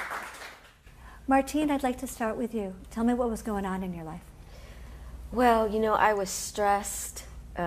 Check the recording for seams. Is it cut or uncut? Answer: cut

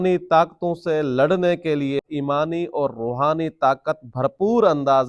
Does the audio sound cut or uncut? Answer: cut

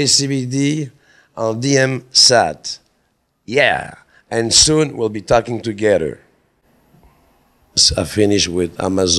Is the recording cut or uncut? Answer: cut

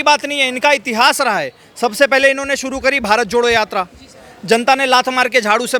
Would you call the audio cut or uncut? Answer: uncut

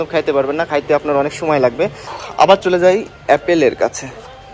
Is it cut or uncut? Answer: cut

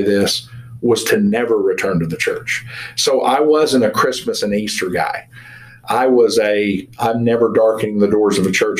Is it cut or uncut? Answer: uncut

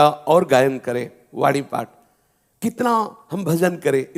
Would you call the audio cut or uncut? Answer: uncut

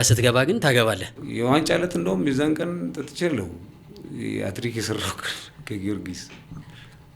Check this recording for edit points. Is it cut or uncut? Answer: cut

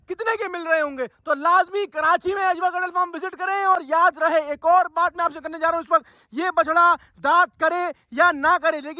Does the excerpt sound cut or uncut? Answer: uncut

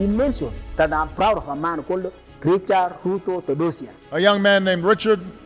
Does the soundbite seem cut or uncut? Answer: uncut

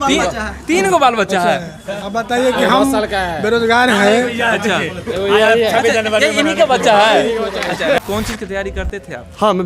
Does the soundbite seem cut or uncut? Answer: cut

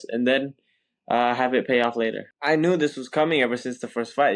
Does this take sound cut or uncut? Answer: cut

